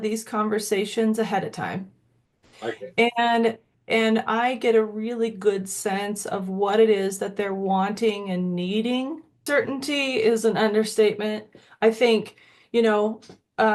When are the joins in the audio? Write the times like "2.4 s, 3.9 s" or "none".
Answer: 9.4 s